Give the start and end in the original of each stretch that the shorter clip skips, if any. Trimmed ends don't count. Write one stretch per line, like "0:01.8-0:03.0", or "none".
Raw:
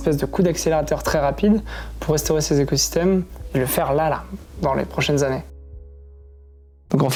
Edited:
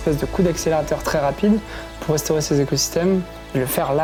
none